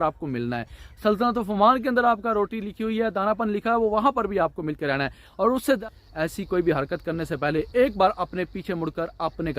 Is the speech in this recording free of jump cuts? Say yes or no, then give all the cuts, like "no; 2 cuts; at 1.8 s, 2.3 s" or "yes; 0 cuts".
no; 1 cut; at 5.8 s